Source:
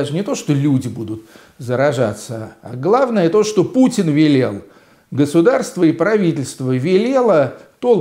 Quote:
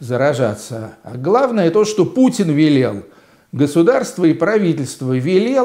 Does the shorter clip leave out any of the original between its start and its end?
no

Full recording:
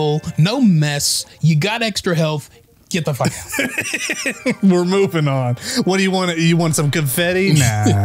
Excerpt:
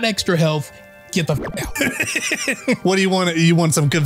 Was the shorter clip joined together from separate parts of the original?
yes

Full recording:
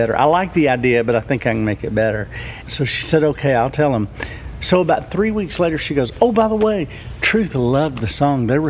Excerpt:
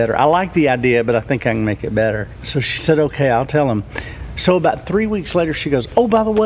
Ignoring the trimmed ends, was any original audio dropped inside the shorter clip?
yes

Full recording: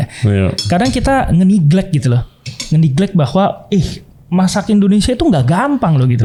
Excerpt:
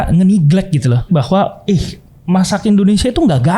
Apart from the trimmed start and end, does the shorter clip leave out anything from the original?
yes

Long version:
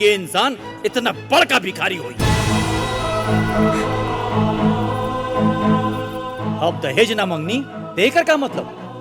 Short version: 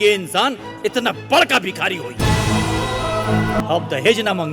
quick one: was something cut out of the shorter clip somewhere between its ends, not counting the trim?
yes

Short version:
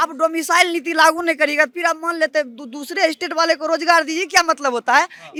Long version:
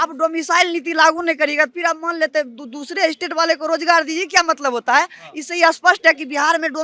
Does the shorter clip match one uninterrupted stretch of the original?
yes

